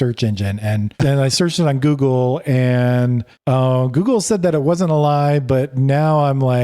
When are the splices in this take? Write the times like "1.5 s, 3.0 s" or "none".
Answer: 0.9 s